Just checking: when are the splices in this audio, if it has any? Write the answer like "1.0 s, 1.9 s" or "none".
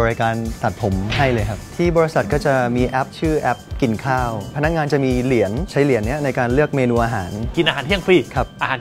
4.5 s, 5.7 s, 7.4 s